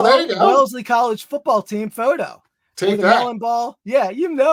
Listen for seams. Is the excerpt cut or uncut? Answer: uncut